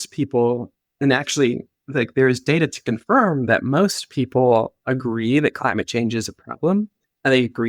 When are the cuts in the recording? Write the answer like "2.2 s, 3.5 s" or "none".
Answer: none